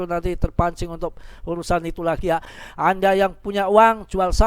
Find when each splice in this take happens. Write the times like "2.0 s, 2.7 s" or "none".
2.6 s